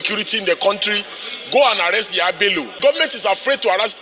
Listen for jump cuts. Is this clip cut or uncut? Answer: cut